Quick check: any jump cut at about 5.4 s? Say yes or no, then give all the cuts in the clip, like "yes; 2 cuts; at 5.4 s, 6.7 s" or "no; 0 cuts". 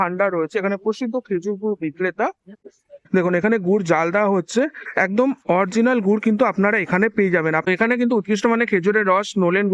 no; 2 cuts; at 2.6 s, 7.7 s